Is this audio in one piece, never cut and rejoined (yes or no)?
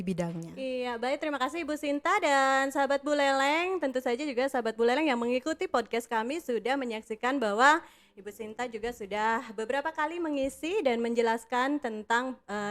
yes